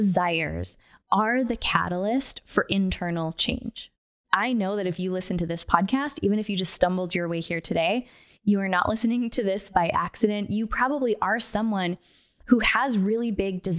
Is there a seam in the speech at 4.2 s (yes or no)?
yes